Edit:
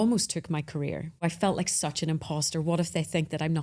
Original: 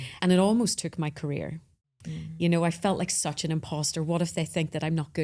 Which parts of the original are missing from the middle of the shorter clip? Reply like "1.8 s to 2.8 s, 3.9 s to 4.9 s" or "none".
1.7 s to 2.7 s